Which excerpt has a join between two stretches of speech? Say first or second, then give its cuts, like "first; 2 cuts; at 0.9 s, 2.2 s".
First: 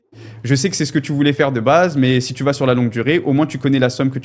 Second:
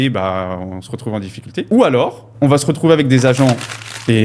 second; 1 cut; at 1.7 s